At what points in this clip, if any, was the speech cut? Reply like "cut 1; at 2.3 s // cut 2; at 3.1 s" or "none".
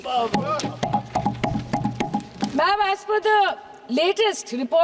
none